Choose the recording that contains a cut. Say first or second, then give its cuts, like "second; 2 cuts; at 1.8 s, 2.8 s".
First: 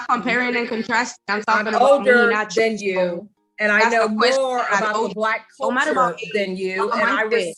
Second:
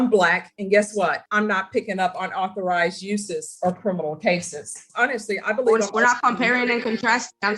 second; 2 cuts; at 1.2 s, 4.8 s